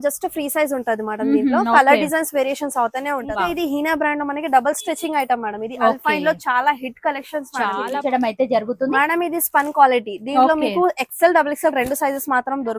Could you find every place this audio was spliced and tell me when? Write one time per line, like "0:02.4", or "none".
0:03.2
0:07.8